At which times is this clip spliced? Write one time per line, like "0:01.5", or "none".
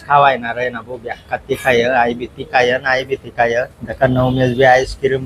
0:03.8